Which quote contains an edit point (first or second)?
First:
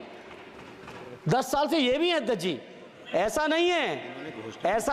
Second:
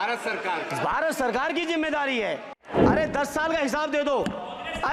second